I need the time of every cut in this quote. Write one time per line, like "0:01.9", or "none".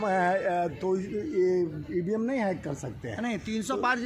none